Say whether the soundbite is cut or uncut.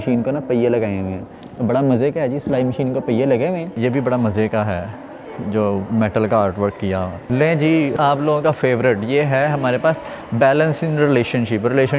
uncut